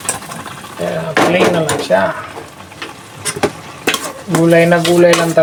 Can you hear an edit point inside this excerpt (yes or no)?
no